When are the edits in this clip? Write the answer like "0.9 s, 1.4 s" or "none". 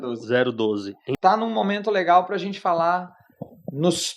1.1 s